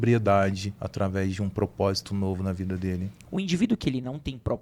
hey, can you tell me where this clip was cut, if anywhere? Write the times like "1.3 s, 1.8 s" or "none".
3.1 s